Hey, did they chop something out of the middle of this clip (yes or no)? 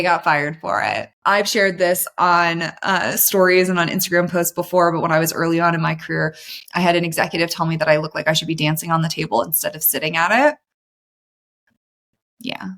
yes